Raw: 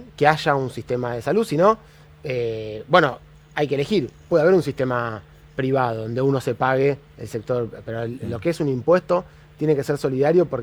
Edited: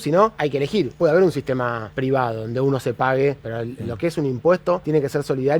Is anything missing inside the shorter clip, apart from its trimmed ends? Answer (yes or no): yes